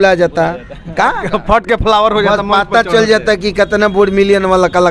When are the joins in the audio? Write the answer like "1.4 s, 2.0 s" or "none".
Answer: none